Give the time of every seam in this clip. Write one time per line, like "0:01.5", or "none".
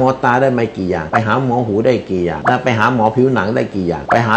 none